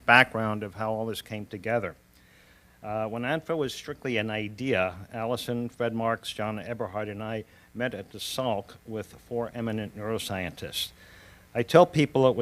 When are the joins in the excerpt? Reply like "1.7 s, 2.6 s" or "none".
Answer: 10.2 s